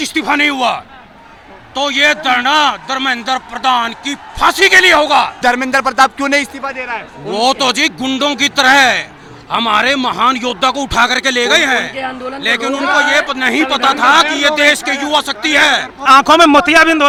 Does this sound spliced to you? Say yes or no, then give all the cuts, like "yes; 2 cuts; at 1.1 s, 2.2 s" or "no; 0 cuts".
no; 0 cuts